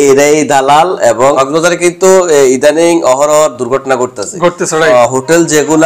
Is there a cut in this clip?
yes; 2 cuts; at 1.4 s, 4.9 s

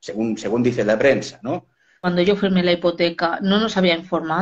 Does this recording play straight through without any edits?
no; 1 cut; at 2.1 s

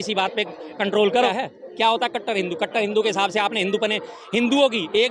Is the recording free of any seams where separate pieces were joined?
no; 1 cut; at 1.3 s

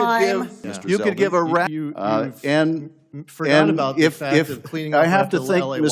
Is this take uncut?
no; 1 cut; at 1.7 s

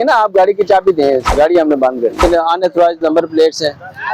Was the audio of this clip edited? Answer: yes; 2 cuts; at 1.3 s, 2.2 s

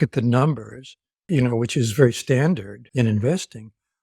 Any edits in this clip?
yes; 2 cuts; at 1.3 s, 2.8 s

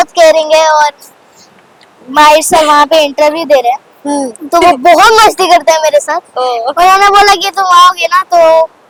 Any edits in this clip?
no; 0 cuts

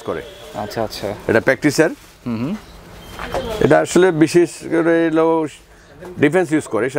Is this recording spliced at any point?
no; 0 cuts

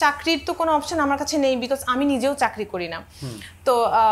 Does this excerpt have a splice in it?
no; 0 cuts

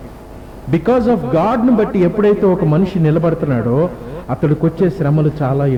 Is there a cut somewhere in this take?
no; 0 cuts

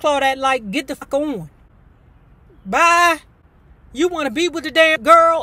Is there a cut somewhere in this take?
yes; 1 cut; at 1.0 s

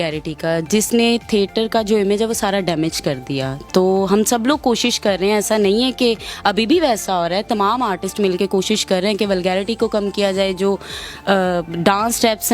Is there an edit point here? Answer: no; 0 cuts

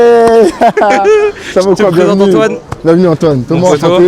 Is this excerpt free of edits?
yes; 0 cuts

